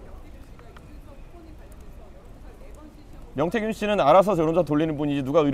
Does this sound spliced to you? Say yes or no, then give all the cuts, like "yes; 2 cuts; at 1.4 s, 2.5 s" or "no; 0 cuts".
no; 0 cuts